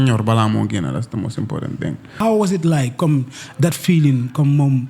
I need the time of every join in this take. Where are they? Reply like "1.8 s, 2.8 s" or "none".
2.2 s